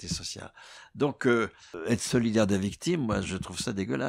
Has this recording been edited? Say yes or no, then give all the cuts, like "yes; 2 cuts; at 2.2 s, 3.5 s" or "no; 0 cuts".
yes; 1 cut; at 1.7 s